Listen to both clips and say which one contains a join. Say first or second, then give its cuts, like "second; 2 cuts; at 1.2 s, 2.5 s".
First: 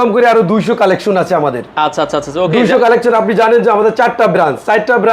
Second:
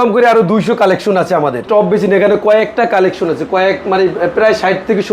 second; 1 cut; at 1.7 s